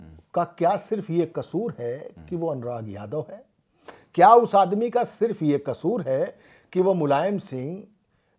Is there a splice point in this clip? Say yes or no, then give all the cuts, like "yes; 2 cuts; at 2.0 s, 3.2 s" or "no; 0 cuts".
no; 0 cuts